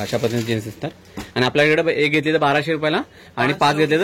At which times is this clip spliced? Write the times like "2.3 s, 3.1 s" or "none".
none